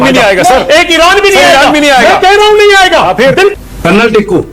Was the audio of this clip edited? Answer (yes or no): yes